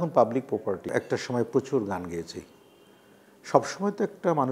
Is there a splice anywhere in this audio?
yes; 1 cut; at 0.9 s

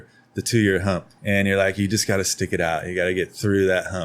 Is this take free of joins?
no; 1 cut; at 1.1 s

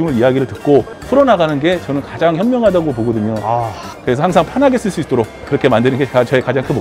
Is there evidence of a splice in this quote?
yes; 2 cuts; at 3.9 s, 5.4 s

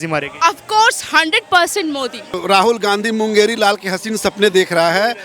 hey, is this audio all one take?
no; 1 cut; at 2.4 s

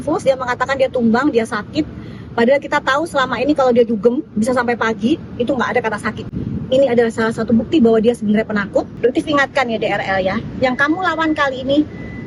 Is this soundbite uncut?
no; 1 cut; at 8.9 s

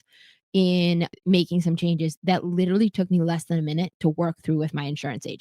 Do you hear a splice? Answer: yes; 1 cut; at 1.1 s

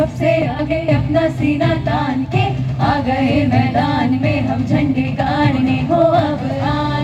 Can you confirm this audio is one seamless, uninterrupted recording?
yes; 0 cuts

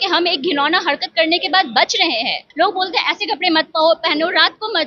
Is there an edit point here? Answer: yes; 1 cut; at 2.4 s

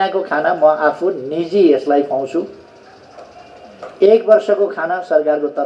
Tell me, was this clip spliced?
no; 0 cuts

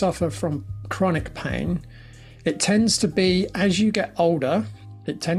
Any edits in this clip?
no; 0 cuts

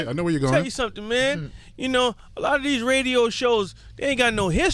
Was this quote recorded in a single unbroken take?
yes; 0 cuts

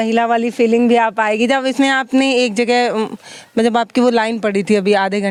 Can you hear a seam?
no; 0 cuts

